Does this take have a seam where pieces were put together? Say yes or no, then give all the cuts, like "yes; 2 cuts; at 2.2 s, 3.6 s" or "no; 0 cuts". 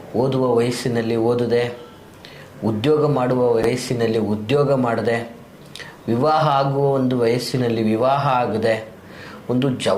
yes; 1 cut; at 3.7 s